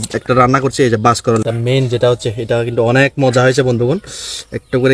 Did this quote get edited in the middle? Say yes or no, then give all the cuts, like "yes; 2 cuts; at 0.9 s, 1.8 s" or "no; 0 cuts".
yes; 1 cut; at 1.4 s